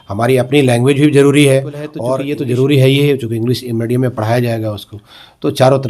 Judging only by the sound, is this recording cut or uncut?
cut